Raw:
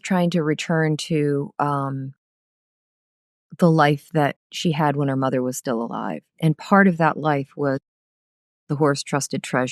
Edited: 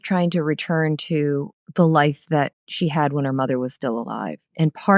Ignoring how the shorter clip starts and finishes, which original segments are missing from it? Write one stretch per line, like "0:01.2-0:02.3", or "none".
0:01.5-0:03.3